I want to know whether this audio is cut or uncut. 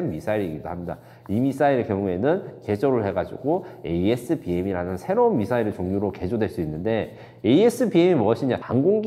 uncut